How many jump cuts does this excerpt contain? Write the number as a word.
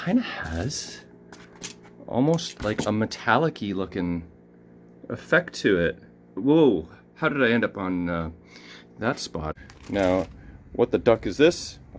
one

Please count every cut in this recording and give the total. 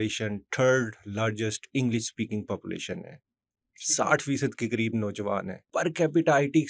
zero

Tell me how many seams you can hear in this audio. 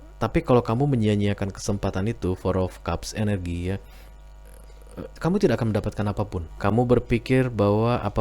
one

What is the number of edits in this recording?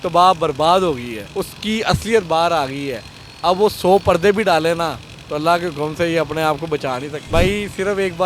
two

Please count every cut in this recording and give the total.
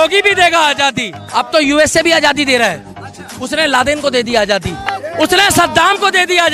two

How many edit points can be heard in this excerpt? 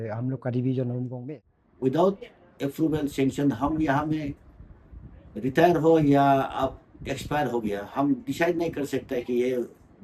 one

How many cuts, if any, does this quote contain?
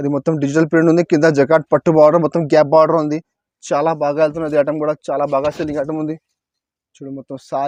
zero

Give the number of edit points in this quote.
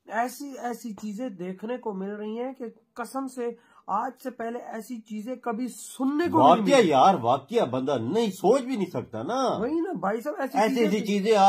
zero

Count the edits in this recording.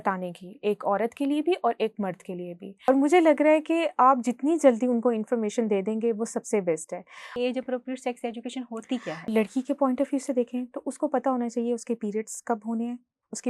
three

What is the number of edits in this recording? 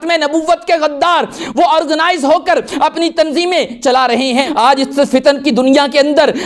one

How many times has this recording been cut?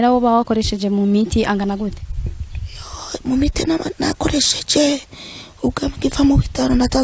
zero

